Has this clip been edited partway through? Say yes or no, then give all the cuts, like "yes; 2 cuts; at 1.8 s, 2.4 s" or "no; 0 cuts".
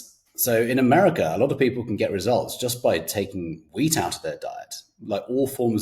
no; 0 cuts